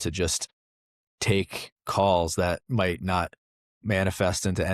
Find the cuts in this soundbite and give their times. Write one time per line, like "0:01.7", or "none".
0:00.9
0:03.8